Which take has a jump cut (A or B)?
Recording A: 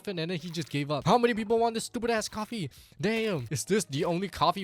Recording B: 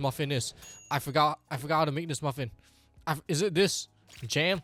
A